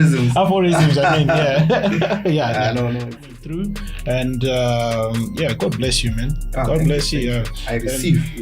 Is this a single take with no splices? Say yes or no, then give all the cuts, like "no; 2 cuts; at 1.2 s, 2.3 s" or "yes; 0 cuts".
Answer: no; 1 cut; at 3.4 s